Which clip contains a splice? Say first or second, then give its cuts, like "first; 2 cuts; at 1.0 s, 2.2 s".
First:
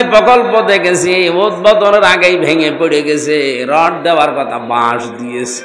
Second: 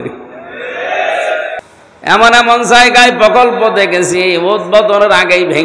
second; 1 cut; at 1.6 s